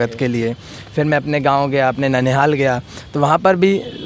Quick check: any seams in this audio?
no; 0 cuts

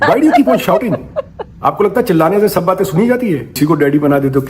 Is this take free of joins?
no; 1 cut; at 3.5 s

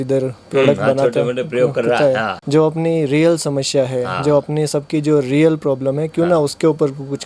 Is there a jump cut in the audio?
no; 0 cuts

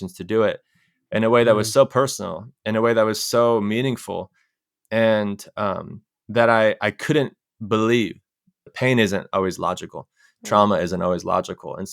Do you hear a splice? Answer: yes; 1 cut; at 8.7 s

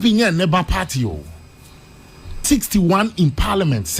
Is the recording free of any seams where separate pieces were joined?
no; 1 cut; at 2.4 s

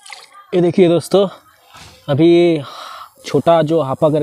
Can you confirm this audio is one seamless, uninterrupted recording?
yes; 0 cuts

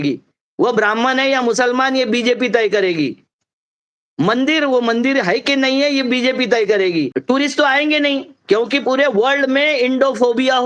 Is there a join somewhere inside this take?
yes; 1 cut; at 7.1 s

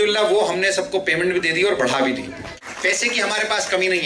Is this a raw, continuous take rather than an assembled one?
no; 1 cut; at 2.6 s

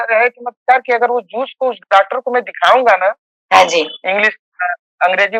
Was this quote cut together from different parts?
no; 0 cuts

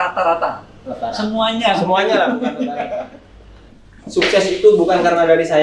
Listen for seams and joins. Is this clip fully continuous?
no; 1 cut; at 3.7 s

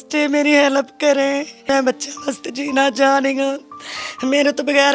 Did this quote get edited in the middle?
yes; 1 cut; at 1.7 s

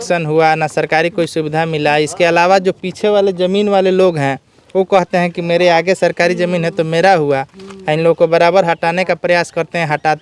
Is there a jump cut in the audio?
no; 0 cuts

